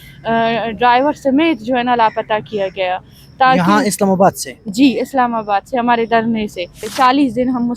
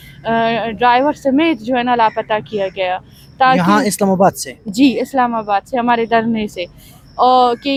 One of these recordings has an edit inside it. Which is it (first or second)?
first